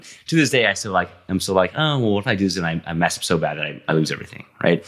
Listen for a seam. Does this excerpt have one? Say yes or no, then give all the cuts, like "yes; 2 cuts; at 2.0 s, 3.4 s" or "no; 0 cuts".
no; 0 cuts